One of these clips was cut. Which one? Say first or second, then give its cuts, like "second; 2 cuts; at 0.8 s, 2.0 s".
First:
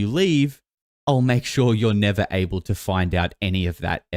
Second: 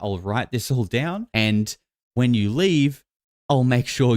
second; 1 cut; at 1.3 s